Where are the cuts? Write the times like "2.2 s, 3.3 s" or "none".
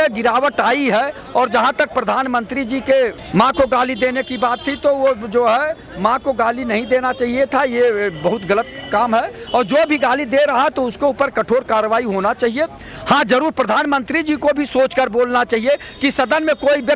none